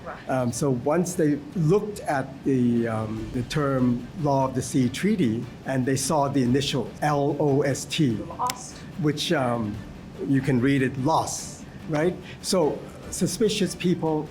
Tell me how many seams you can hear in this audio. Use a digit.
4